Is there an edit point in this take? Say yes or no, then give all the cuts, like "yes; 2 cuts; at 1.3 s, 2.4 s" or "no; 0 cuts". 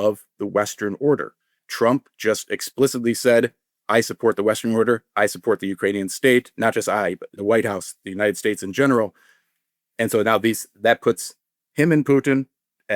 yes; 1 cut; at 1.6 s